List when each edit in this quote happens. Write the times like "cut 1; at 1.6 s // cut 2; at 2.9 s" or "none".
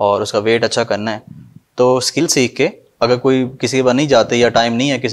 cut 1; at 2.4 s

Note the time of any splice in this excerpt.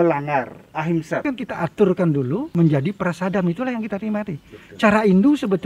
cut 1; at 1.2 s // cut 2; at 2.5 s

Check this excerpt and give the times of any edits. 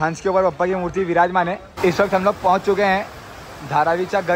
cut 1; at 1.7 s

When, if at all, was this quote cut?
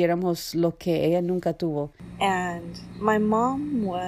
cut 1; at 2.0 s

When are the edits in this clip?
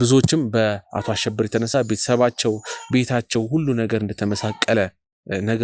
none

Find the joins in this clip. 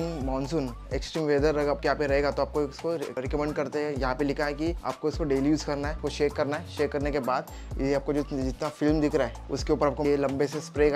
cut 1; at 4.9 s // cut 2; at 6.0 s // cut 3; at 9.4 s

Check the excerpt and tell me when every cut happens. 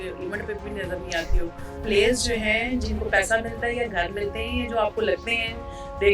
cut 1; at 1.8 s

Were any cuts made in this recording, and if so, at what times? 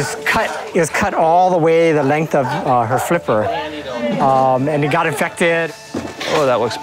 cut 1; at 5.7 s

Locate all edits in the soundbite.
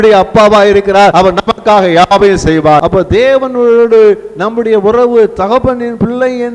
cut 1; at 1.1 s // cut 2; at 2.8 s // cut 3; at 5.7 s

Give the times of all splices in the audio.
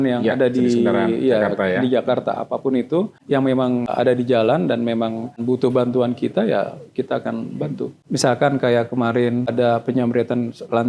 cut 1; at 3.5 s // cut 2; at 5.4 s // cut 3; at 8.0 s // cut 4; at 9.5 s

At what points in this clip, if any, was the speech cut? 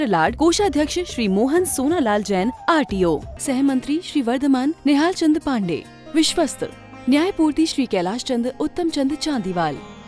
none

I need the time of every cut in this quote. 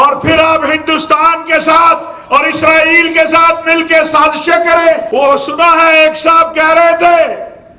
cut 1; at 5.0 s

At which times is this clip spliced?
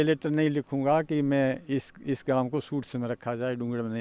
none

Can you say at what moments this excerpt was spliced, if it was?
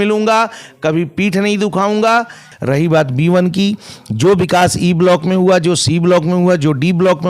cut 1; at 2.4 s

